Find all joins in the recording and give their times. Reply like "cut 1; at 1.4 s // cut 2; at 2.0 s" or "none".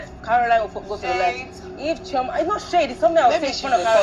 cut 1; at 2.9 s